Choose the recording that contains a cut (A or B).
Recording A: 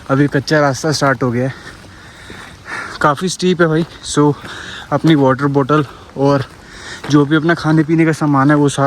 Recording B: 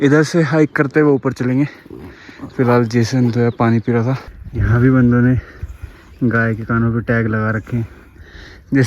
B